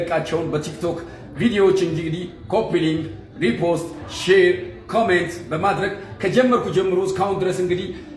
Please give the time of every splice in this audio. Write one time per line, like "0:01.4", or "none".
none